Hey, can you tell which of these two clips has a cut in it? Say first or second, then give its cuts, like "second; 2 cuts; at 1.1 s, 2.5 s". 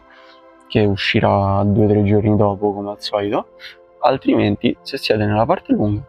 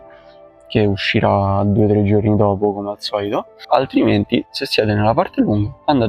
second; 1 cut; at 3.5 s